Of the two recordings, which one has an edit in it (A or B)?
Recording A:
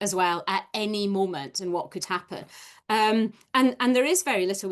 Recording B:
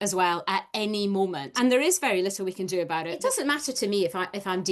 B